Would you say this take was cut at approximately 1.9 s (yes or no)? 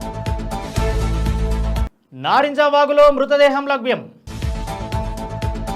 yes